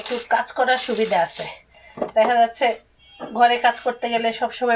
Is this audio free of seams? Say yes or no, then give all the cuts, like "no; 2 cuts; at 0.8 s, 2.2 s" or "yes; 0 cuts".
yes; 0 cuts